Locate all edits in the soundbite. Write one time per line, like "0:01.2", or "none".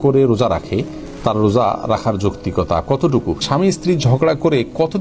0:03.4